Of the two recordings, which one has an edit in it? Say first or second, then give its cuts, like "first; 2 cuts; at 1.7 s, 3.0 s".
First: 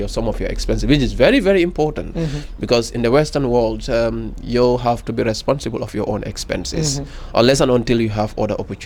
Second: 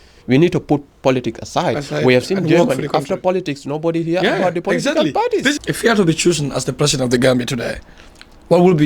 second; 1 cut; at 5.7 s